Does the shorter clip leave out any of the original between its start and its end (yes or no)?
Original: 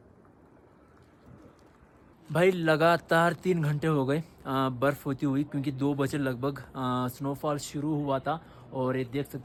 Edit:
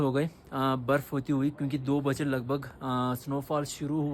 no